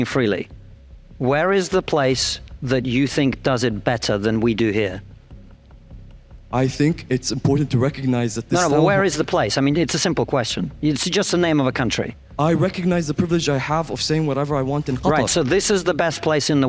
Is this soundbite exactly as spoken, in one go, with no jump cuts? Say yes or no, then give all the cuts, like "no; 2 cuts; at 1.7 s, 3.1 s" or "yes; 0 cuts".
yes; 0 cuts